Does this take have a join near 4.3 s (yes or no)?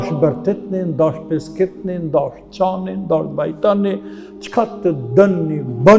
no